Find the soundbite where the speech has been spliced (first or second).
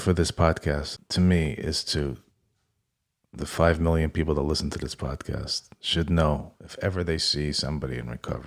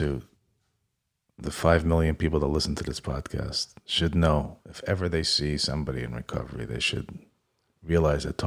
first